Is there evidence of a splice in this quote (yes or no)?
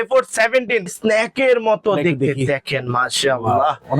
yes